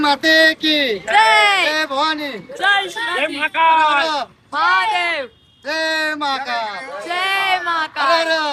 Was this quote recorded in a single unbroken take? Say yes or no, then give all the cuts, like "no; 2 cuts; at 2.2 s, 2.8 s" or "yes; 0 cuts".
yes; 0 cuts